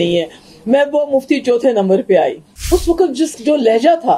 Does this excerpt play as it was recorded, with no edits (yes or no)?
no